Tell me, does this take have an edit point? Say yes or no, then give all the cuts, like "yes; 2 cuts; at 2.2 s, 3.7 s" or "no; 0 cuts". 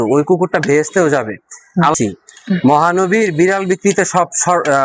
yes; 1 cut; at 1.9 s